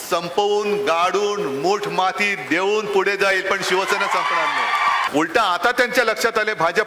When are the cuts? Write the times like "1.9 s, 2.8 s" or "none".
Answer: 5.1 s

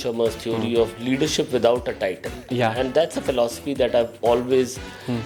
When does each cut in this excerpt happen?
none

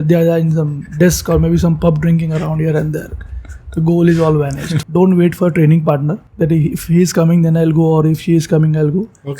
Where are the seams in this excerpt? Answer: 4.8 s, 6.2 s

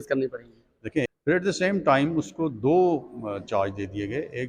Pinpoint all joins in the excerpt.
1.1 s

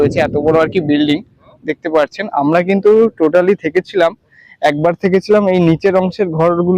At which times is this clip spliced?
none

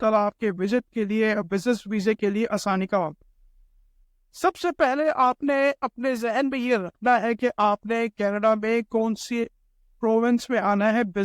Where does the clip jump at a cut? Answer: none

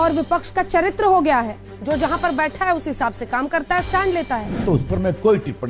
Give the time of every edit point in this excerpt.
4.6 s

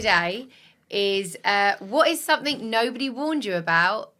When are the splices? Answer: none

